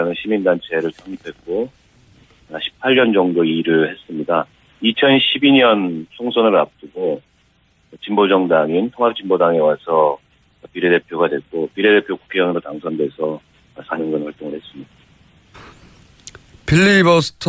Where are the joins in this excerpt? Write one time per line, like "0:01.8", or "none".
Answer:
0:10.4